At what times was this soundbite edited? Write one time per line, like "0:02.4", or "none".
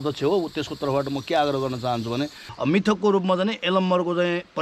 0:02.4